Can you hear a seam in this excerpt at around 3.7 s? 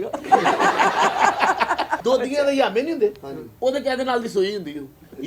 no; 1 cut; at 2.0 s

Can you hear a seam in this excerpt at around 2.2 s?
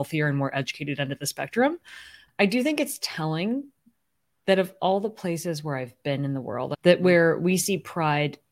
yes; 2 cuts; at 2.2 s, 6.7 s

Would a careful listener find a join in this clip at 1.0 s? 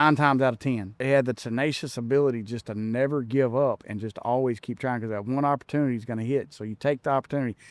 yes; 1 cut; at 1.0 s

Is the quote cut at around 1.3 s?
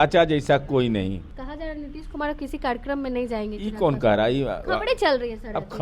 yes; 1 cut; at 1.3 s

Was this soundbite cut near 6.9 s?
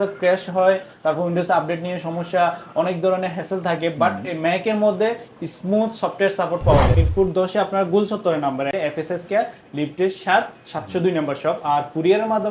yes; 2 cuts; at 6.9 s, 8.7 s

